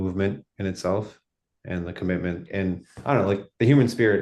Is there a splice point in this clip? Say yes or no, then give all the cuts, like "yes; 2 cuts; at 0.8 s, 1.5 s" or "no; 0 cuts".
yes; 1 cut; at 2.4 s